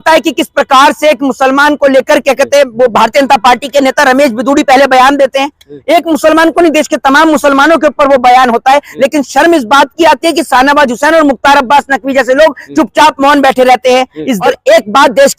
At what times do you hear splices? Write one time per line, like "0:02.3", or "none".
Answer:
0:14.4